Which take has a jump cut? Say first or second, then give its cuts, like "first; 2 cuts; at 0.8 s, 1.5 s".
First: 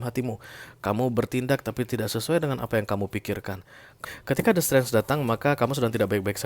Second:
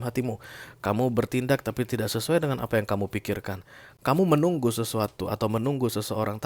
first; 1 cut; at 3.9 s